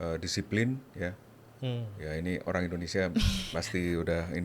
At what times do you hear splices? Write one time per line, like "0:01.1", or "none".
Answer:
none